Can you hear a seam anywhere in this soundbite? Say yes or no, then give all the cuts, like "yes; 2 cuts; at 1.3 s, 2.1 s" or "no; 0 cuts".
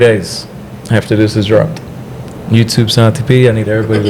no; 0 cuts